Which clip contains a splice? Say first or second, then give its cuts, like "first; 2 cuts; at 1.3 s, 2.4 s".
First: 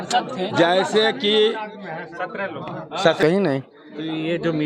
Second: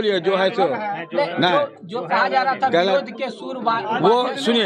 first; 1 cut; at 3.2 s